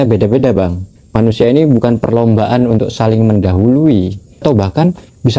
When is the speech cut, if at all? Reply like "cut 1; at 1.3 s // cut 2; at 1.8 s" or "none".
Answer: cut 1; at 4.4 s